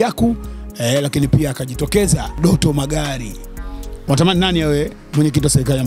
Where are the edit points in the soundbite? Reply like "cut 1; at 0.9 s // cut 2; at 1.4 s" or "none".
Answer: cut 1; at 2.3 s